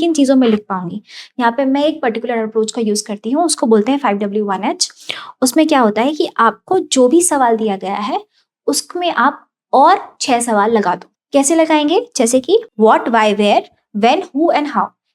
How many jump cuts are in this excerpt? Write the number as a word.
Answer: two